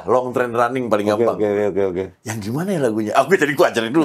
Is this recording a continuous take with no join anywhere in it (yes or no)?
yes